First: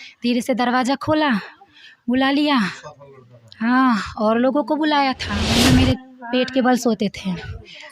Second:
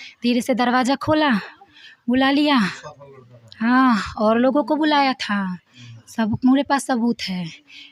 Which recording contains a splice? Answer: first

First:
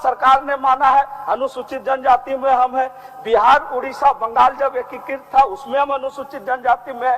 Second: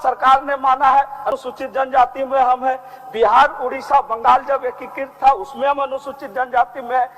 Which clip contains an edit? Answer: second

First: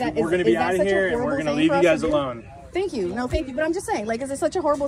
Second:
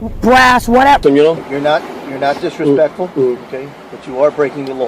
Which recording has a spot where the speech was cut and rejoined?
second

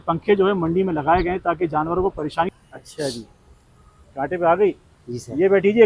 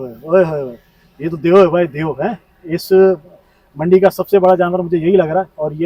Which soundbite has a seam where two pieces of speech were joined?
first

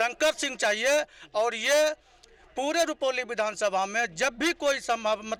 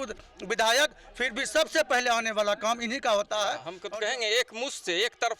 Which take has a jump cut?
second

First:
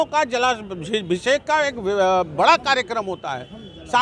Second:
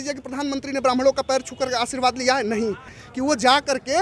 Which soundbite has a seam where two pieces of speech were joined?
second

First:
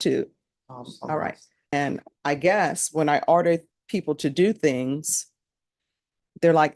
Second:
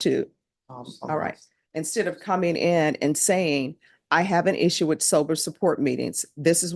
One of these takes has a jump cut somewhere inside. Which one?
first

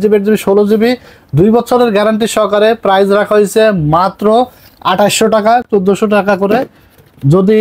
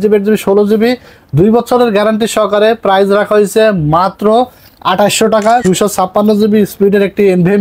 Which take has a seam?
second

